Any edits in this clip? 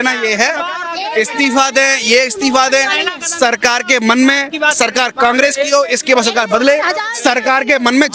no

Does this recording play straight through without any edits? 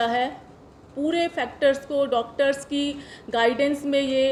yes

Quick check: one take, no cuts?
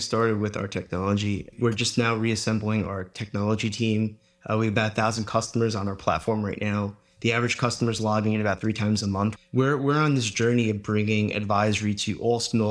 no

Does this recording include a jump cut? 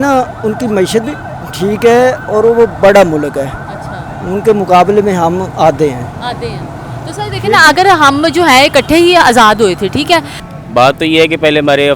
yes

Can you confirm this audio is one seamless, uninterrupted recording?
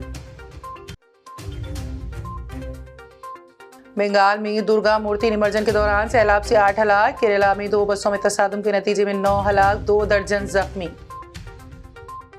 yes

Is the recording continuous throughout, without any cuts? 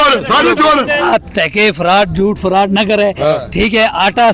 no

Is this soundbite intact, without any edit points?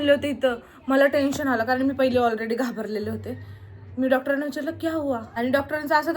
no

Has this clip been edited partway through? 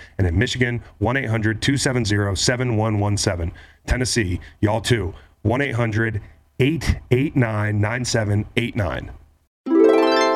yes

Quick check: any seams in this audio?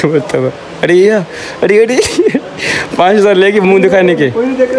no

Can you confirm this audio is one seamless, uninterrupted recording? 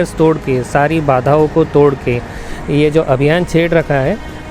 no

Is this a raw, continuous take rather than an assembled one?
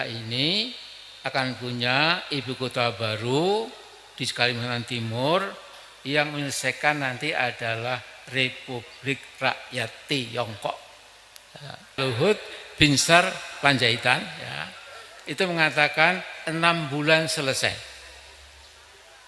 no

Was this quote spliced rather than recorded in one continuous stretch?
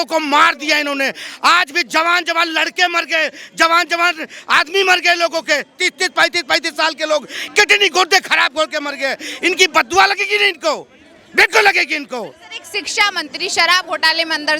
no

